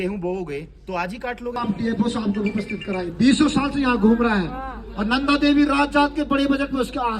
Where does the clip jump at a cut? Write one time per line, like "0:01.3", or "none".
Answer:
0:01.6